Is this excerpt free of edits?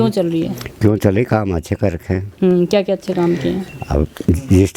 yes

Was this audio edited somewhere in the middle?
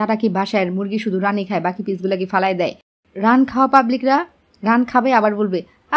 yes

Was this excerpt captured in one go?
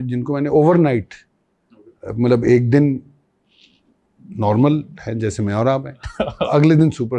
yes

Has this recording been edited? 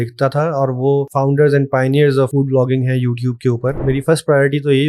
yes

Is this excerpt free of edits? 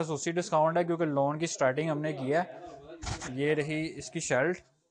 yes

